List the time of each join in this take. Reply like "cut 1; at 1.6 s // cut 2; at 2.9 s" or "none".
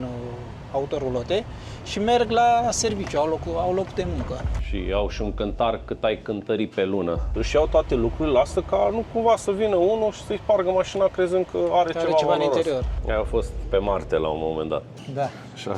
cut 1; at 4.5 s // cut 2; at 7.3 s // cut 3; at 13.0 s